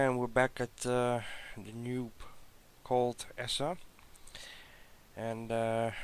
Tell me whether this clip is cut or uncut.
cut